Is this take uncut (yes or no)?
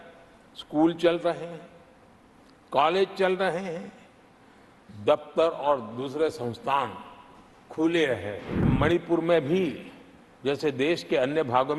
no